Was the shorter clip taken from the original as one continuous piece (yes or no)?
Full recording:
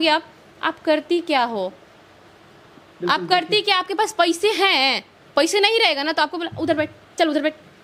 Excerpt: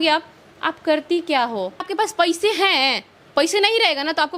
no